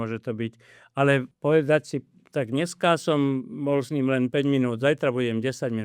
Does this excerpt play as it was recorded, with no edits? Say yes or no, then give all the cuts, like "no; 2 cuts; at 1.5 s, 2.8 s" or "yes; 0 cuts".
no; 1 cut; at 1.3 s